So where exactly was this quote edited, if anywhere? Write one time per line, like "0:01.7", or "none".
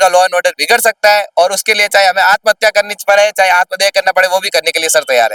none